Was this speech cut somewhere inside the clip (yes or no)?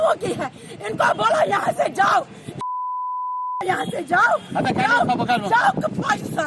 no